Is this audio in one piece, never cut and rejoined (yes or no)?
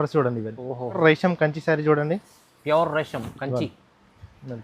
no